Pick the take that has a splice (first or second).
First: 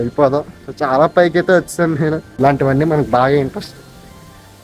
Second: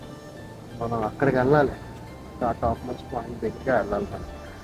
first